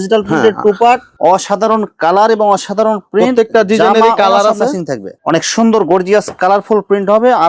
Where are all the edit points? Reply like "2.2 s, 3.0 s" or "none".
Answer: 1.1 s, 5.2 s

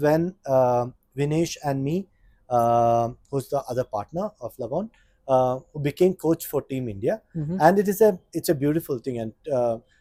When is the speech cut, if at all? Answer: none

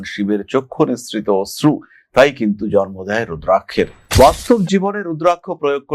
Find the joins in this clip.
4.0 s

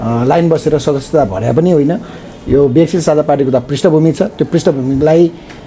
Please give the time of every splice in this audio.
none

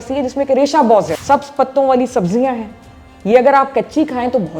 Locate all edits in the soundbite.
1.2 s

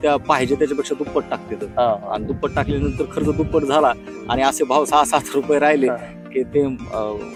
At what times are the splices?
none

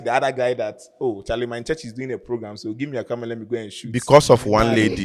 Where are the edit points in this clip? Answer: none

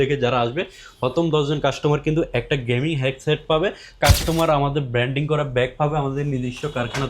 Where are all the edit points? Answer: 4.0 s

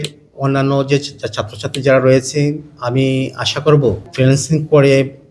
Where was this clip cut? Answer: 4.1 s

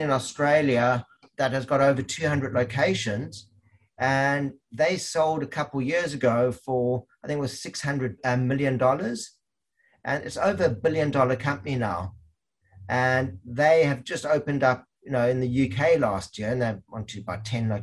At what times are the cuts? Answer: 1.3 s, 8.2 s

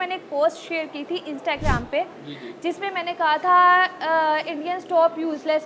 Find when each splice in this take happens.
none

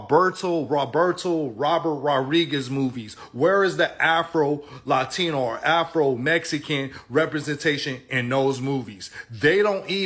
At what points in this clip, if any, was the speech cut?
none

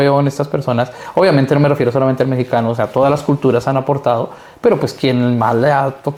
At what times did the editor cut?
none

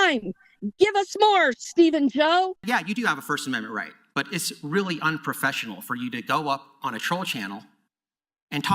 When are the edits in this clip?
2.6 s

